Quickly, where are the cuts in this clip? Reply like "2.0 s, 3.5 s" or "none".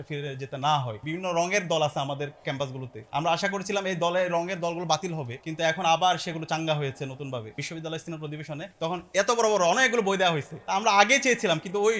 1.0 s, 7.6 s